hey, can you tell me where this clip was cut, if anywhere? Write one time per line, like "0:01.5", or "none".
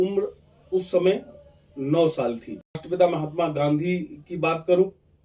0:02.8

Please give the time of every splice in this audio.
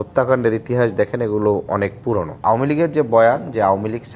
0:02.8

